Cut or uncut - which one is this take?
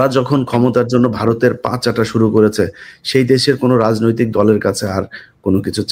uncut